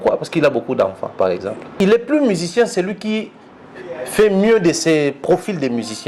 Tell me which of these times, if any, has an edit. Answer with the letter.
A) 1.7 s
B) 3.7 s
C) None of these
A